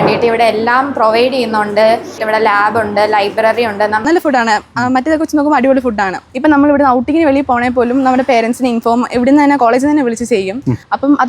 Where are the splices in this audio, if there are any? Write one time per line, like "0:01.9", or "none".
0:02.1
0:04.0
0:06.3